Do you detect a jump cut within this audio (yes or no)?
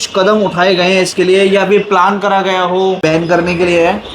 yes